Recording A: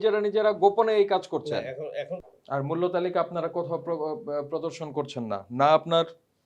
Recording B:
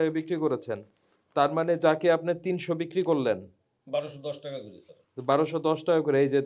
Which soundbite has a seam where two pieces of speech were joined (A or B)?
A